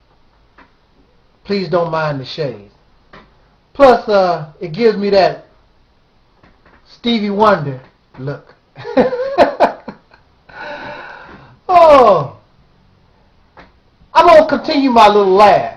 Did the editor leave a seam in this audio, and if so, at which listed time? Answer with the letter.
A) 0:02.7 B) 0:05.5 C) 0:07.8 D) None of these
B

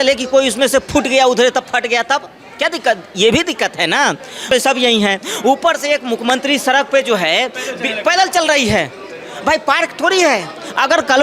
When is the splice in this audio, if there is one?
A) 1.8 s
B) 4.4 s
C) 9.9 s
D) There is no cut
B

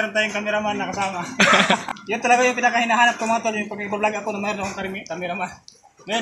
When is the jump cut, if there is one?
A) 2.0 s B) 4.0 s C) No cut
A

